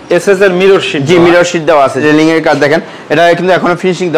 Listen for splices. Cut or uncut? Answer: cut